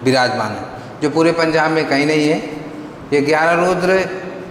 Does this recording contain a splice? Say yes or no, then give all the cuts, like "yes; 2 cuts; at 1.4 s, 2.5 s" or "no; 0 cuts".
no; 0 cuts